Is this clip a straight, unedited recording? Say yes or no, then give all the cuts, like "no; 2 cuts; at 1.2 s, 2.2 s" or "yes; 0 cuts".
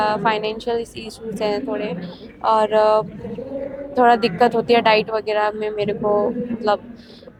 yes; 0 cuts